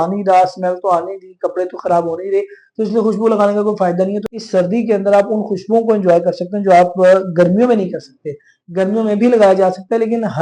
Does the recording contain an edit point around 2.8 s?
no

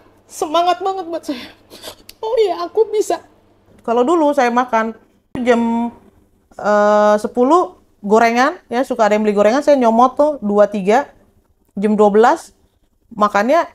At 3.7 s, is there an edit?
yes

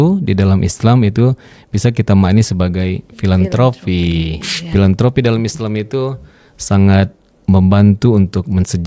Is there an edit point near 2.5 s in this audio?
no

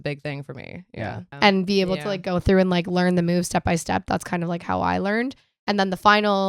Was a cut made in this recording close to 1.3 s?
yes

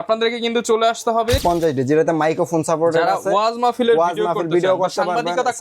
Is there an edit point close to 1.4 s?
yes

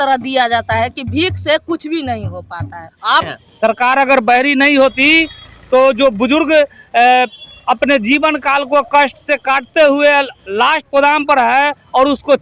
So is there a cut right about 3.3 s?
yes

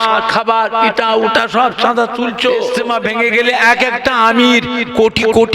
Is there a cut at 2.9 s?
yes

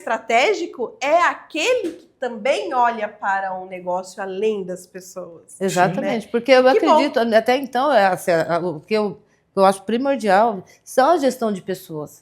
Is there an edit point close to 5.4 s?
no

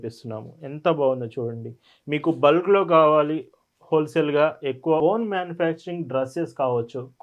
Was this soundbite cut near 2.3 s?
no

